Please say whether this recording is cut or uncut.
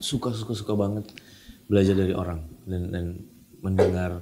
uncut